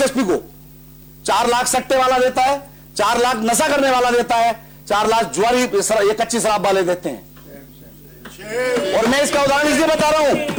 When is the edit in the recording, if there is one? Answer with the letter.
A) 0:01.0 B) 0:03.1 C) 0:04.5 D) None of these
D